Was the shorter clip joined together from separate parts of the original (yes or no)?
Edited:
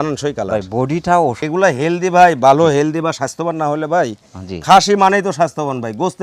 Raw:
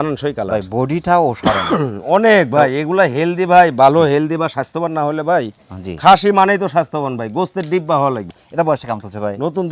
yes